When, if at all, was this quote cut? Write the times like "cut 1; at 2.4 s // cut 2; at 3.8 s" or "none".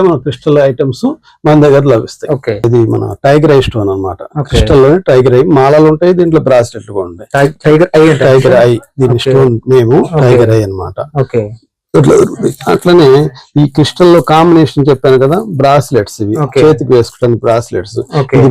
cut 1; at 2.7 s